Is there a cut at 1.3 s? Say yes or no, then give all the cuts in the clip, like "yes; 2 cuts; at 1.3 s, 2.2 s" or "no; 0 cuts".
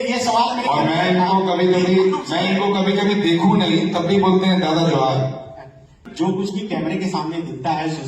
no; 1 cut; at 5.9 s